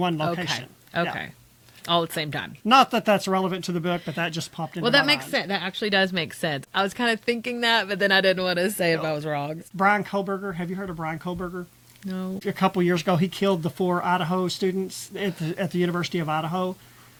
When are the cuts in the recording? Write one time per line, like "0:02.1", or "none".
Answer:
none

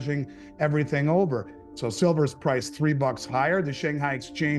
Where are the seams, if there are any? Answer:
none

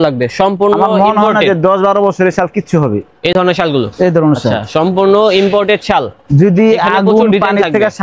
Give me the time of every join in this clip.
none

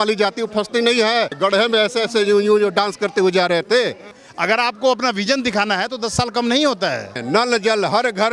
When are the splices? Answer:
0:01.3
0:04.1
0:07.2

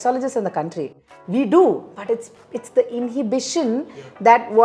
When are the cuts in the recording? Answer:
none

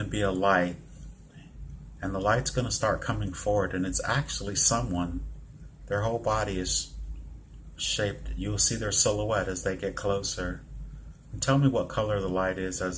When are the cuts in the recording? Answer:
none

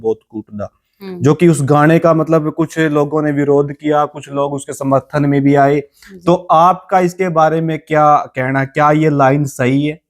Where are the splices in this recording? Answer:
none

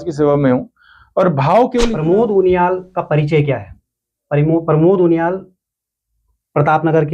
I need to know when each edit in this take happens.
0:02.0

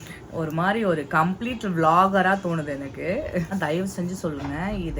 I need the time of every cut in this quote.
0:03.5

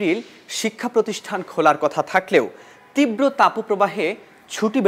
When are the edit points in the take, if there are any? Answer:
none

